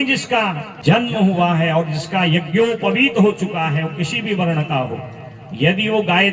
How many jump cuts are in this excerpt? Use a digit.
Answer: 0